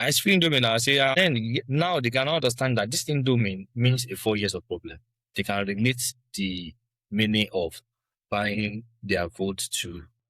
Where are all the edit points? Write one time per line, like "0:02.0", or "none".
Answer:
0:01.1

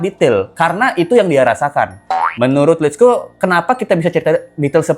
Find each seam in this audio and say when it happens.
none

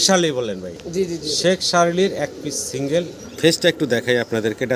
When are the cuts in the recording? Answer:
0:03.2

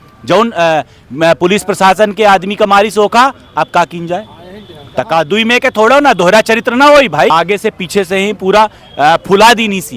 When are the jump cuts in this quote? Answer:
0:07.3

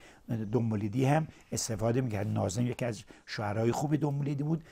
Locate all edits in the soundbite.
none

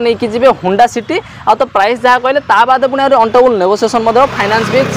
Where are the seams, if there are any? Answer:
none

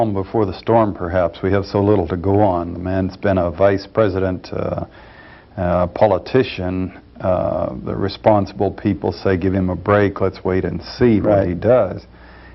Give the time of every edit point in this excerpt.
0:03.9

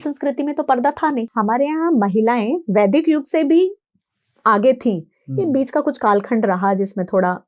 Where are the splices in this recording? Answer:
0:01.3

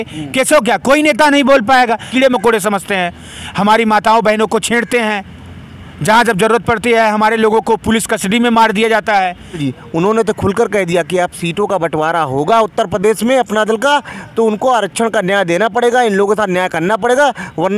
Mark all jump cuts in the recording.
0:02.1
0:09.6

